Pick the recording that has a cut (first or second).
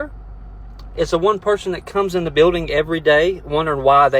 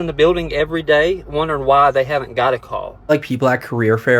second